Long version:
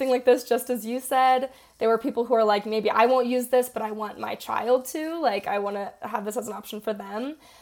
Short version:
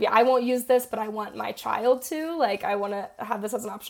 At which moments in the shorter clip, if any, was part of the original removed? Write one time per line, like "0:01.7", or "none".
none